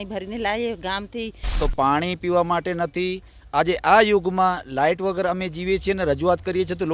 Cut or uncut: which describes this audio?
cut